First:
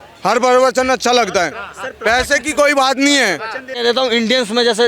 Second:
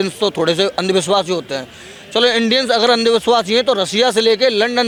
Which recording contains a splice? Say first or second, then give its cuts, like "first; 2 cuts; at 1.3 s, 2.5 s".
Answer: first; 1 cut; at 3.8 s